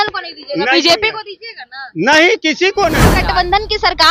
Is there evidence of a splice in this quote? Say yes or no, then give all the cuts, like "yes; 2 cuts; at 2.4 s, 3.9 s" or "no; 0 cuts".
yes; 1 cut; at 3.0 s